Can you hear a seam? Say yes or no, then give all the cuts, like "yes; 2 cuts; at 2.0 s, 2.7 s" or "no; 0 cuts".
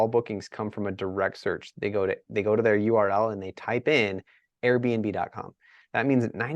no; 0 cuts